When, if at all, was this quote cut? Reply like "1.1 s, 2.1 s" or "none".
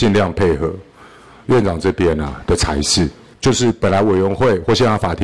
3.2 s